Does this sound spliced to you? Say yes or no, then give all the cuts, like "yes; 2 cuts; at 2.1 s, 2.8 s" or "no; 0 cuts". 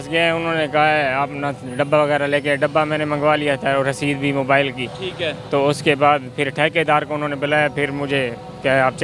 no; 0 cuts